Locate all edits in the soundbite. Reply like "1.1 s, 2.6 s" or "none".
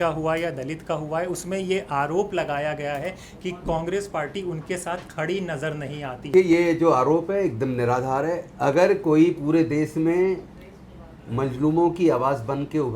6.3 s